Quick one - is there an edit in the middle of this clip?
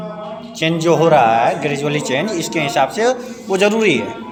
no; 0 cuts

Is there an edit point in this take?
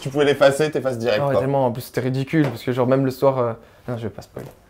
no; 0 cuts

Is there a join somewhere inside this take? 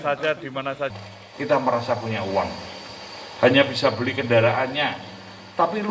yes; 1 cut; at 0.9 s

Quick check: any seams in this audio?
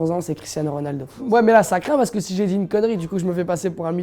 yes; 1 cut; at 1.2 s

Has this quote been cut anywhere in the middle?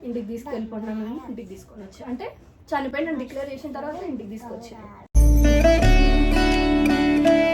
no; 0 cuts

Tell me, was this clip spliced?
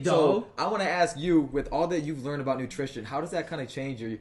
no; 0 cuts

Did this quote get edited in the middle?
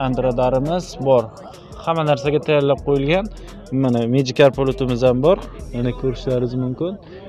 no; 0 cuts

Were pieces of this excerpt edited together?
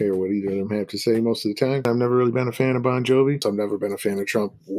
yes; 2 cuts; at 1.8 s, 3.4 s

